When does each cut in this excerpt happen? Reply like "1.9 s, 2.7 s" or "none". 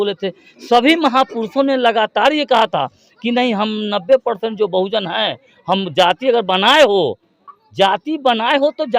none